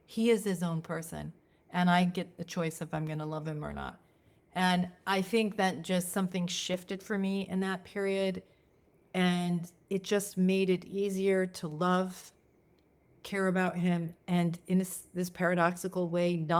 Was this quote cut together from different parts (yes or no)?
no